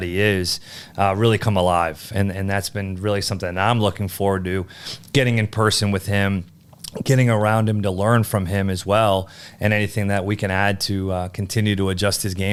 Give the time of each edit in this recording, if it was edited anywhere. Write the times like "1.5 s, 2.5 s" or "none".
none